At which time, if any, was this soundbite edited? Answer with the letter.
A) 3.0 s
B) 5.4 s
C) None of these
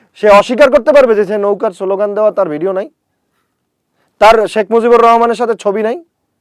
C